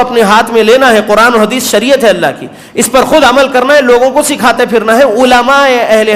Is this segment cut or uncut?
uncut